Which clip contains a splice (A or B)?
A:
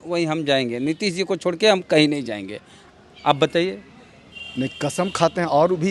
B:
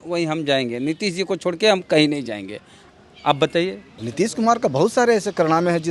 B